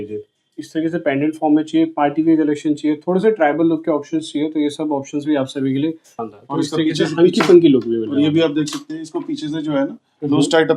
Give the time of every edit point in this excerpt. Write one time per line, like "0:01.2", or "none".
0:06.1

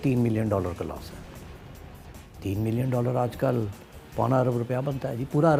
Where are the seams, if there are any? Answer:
none

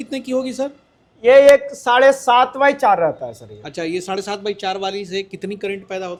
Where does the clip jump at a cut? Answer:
none

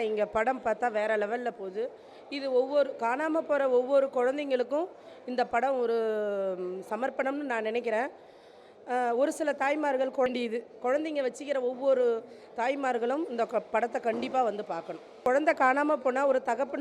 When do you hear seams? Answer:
0:10.3
0:15.2

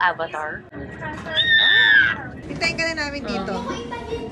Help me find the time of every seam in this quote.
0:02.4

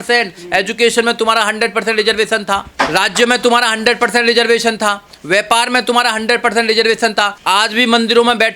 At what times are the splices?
0:07.4

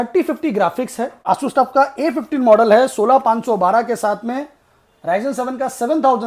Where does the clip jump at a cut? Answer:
0:01.3

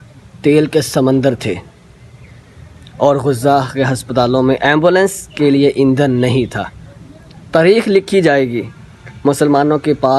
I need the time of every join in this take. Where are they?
none

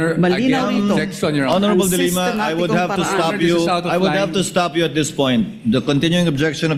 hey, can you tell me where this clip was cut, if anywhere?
none

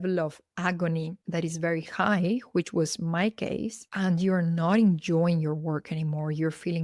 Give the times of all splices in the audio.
none

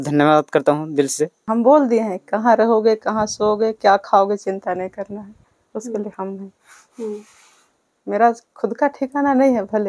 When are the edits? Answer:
0:01.5

